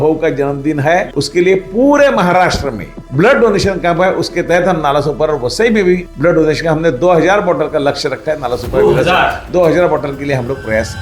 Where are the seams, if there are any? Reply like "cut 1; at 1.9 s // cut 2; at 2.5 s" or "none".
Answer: none